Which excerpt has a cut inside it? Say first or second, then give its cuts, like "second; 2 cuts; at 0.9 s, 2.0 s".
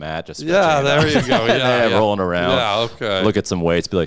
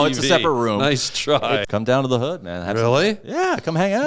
second; 1 cut; at 1.6 s